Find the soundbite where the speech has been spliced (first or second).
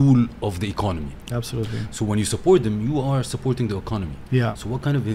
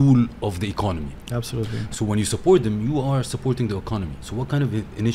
second